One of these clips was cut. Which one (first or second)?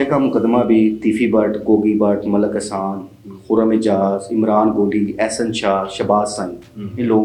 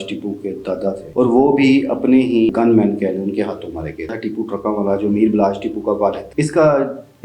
second